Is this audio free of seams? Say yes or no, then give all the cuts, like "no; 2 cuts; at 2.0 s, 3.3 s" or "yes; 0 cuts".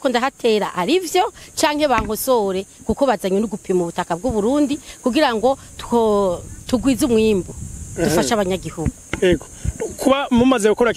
yes; 0 cuts